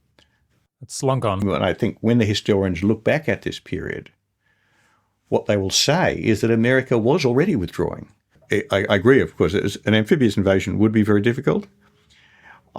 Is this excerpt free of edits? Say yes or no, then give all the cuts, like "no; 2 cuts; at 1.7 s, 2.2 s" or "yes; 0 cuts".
no; 2 cuts; at 1.4 s, 8.3 s